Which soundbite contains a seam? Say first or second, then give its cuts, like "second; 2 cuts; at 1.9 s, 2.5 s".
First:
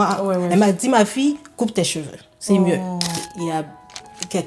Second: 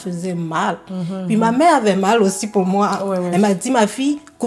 first; 1 cut; at 3.2 s